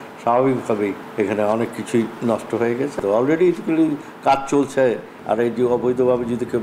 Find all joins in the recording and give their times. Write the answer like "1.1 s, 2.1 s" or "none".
1.0 s, 3.0 s